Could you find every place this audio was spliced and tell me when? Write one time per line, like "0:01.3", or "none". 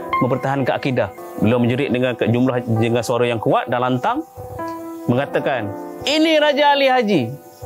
0:01.2

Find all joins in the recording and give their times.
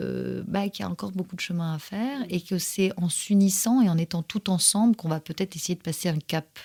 none

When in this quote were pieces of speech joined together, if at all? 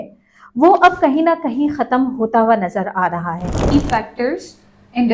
0:03.7

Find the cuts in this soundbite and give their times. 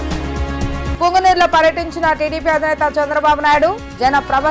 none

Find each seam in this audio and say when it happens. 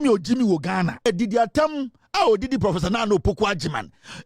0:01.1

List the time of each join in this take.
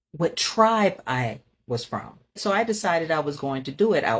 0:02.4

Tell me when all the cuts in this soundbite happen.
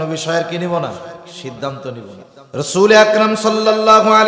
0:02.3

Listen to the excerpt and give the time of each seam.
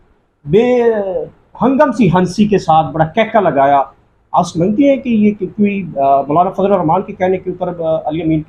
none

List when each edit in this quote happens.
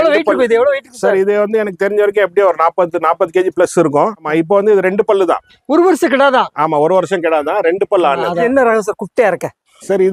none

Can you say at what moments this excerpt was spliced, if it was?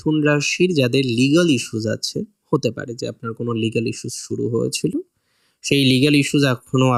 none

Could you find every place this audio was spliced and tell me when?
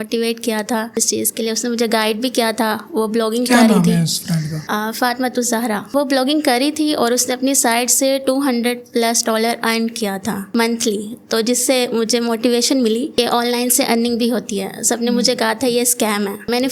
none

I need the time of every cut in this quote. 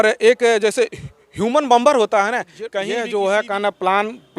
0:02.9

